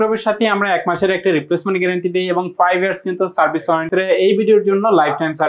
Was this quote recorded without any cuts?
no; 1 cut; at 3.9 s

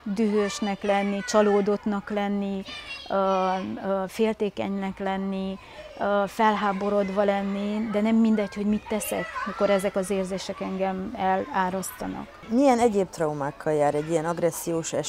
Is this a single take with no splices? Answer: yes; 0 cuts

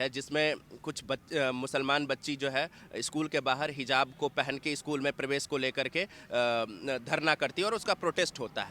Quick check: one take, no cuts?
yes; 0 cuts

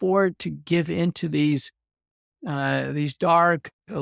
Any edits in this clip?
no; 0 cuts

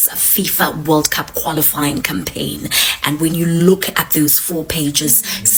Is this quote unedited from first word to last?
yes; 0 cuts

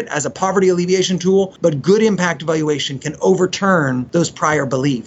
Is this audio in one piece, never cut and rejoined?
no; 2 cuts; at 1.5 s, 4.1 s

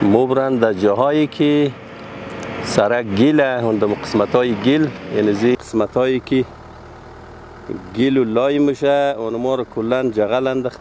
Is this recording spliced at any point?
yes; 1 cut; at 5.5 s

